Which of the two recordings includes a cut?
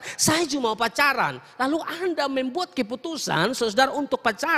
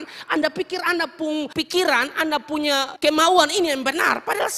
second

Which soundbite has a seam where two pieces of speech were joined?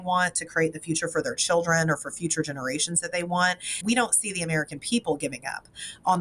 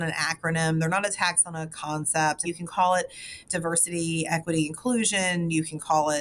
second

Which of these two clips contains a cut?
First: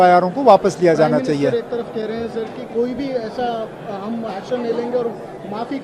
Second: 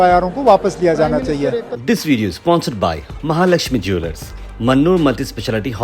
second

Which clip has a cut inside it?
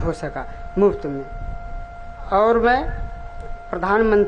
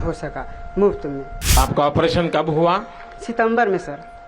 second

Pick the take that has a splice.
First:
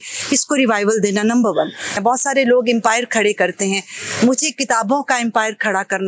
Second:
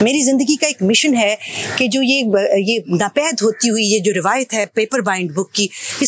first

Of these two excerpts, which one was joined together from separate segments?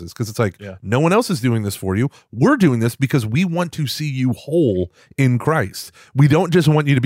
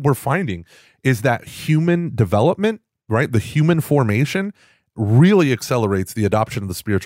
second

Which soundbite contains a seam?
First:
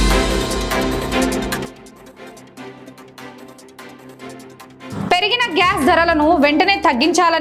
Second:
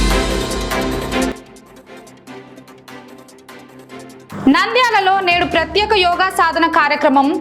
second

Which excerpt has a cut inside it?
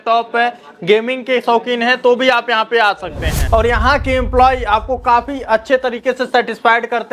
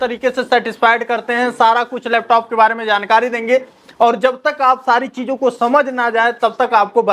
first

